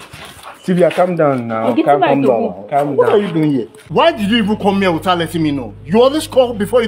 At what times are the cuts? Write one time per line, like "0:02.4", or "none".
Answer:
0:03.8